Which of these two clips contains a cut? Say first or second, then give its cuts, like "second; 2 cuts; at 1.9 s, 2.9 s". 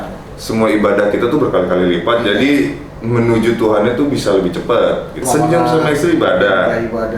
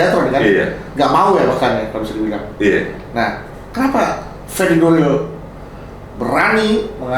first; 1 cut; at 5.1 s